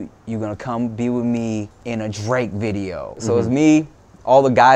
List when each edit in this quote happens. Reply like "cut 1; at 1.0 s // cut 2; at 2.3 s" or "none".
cut 1; at 1.8 s // cut 2; at 3.2 s